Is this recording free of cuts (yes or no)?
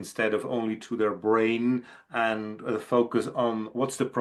yes